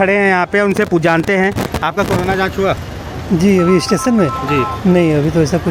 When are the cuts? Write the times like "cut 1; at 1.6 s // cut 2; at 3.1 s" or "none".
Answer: none